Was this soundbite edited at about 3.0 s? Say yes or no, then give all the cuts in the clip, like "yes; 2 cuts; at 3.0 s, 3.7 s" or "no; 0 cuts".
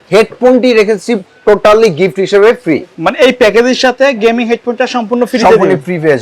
yes; 1 cut; at 3.0 s